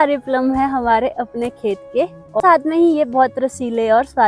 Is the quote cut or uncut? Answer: uncut